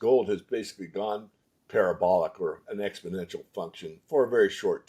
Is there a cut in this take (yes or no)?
no